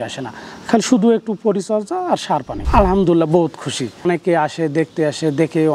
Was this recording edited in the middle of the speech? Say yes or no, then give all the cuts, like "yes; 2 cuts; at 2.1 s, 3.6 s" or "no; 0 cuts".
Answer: yes; 2 cuts; at 2.6 s, 4.0 s